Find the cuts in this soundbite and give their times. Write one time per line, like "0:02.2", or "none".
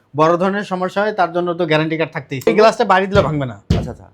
0:02.5